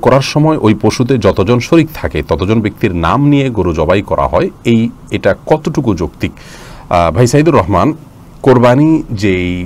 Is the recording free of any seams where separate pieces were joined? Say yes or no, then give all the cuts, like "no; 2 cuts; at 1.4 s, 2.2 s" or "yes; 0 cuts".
yes; 0 cuts